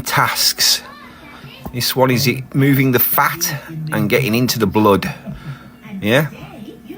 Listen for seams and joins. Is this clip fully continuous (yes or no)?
yes